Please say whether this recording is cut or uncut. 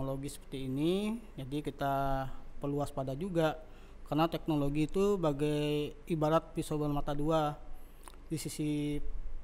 uncut